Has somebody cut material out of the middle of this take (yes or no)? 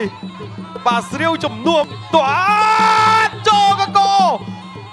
yes